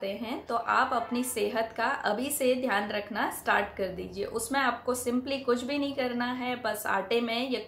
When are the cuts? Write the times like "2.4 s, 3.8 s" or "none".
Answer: none